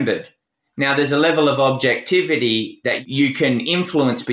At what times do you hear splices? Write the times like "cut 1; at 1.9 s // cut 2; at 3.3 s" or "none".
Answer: cut 1; at 3.0 s